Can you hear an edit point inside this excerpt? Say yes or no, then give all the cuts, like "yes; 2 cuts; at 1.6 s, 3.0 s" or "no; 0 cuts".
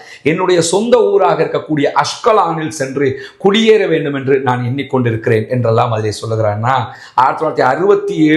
no; 0 cuts